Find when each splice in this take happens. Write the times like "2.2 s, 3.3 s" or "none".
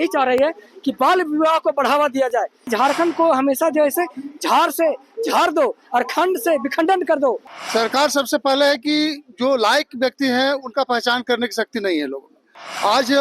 2.7 s, 7.5 s